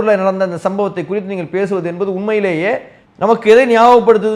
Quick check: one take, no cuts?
yes; 0 cuts

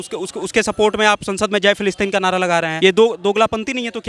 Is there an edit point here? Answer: yes; 1 cut; at 2.7 s

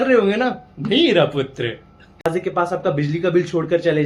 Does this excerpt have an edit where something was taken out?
yes; 1 cut; at 2.3 s

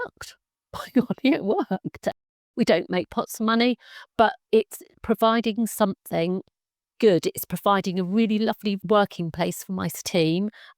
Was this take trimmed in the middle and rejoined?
yes; 3 cuts; at 2.1 s, 8.8 s, 10.0 s

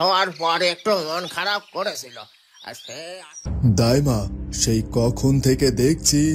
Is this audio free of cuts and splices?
no; 1 cut; at 3.5 s

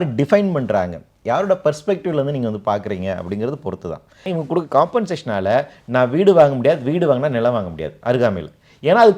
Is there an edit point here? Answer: yes; 1 cut; at 4.4 s

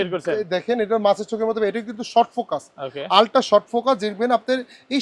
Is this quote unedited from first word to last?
yes; 0 cuts

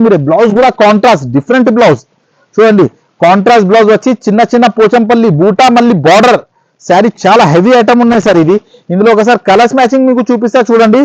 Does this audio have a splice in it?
no; 0 cuts

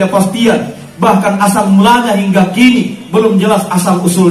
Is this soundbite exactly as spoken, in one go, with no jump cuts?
no; 1 cut; at 3.0 s

